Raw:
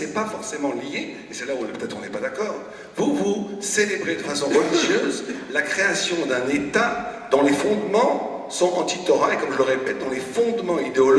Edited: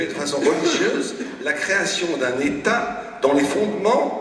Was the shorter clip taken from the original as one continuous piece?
yes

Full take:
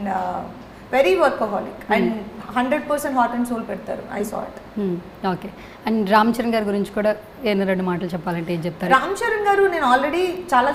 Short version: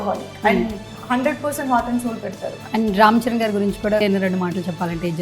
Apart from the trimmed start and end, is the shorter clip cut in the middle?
yes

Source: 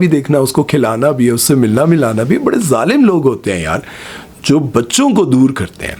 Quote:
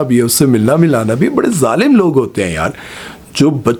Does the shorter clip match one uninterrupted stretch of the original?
yes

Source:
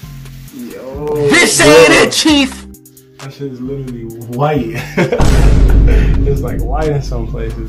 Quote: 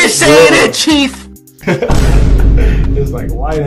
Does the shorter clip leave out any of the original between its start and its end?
yes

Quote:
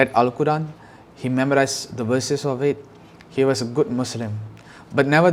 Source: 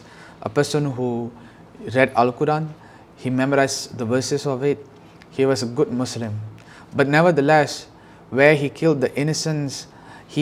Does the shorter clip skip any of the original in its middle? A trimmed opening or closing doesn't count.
no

